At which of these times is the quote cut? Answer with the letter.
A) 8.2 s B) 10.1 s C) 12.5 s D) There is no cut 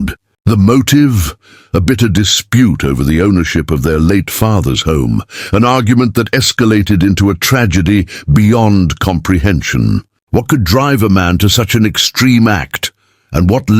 B